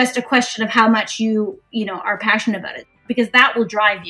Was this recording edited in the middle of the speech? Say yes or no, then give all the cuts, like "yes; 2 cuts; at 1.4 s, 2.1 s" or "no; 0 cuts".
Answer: yes; 1 cut; at 2.9 s